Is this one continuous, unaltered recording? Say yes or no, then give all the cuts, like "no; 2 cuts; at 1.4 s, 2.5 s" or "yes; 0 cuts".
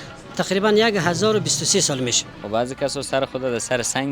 no; 1 cut; at 2.3 s